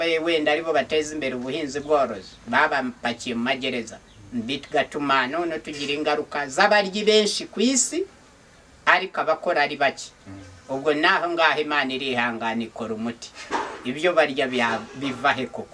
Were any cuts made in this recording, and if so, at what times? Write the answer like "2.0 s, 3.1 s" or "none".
none

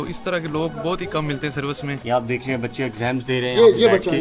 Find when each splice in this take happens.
2.0 s

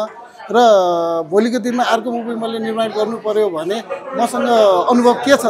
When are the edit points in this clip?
none

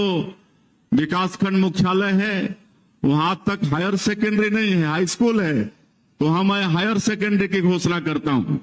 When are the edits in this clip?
none

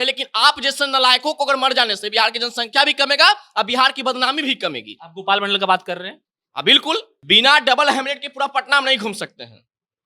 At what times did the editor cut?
7.1 s

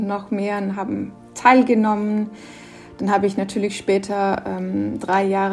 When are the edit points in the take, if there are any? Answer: none

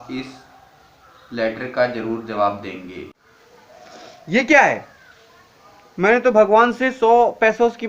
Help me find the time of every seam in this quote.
2.9 s

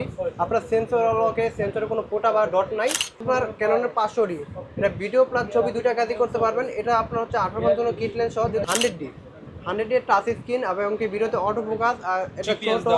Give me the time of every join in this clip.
3.2 s, 8.6 s

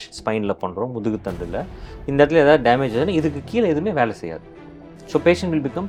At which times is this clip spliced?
none

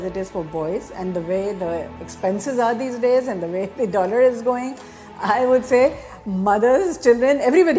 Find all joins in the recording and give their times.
none

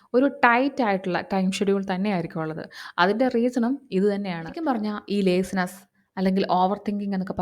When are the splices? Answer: 4.6 s

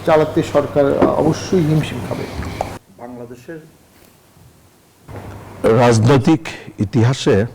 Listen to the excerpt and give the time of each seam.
2.8 s

